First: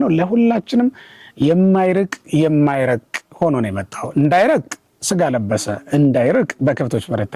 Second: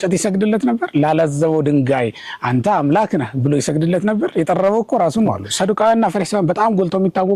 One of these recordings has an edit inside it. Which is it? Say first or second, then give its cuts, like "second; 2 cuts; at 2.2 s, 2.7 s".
second; 1 cut; at 5.4 s